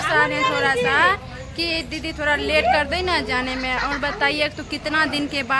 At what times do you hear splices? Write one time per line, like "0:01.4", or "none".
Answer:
none